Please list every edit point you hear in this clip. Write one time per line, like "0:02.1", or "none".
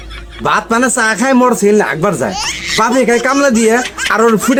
none